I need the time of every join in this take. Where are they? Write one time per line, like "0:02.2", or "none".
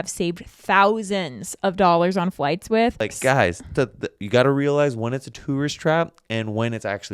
0:03.1